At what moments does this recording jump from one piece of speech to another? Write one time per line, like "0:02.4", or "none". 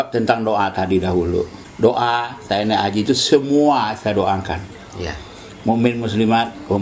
0:01.6